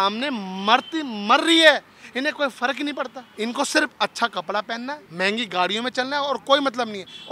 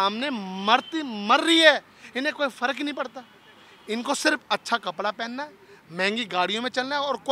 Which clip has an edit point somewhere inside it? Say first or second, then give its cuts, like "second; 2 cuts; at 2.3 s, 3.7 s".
first; 2 cuts; at 3.2 s, 5.0 s